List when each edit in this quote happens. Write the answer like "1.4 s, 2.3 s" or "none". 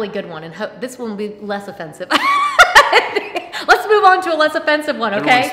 none